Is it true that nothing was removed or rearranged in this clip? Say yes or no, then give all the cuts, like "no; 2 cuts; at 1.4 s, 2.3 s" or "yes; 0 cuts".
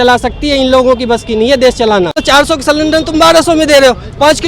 no; 1 cut; at 2.2 s